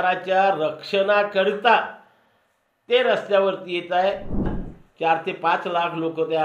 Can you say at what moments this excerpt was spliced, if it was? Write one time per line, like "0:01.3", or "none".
0:04.5